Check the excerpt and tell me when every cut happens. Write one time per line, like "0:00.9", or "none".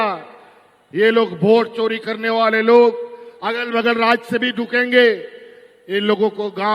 none